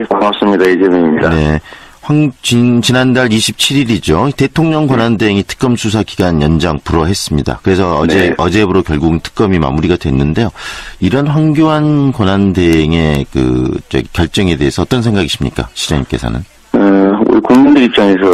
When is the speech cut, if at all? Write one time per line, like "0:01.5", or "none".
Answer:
0:17.0